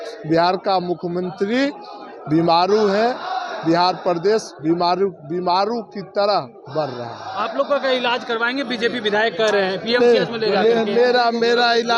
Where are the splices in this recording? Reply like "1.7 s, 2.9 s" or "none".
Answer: none